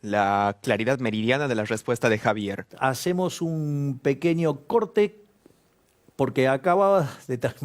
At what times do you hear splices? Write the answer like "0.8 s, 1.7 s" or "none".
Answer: 2.6 s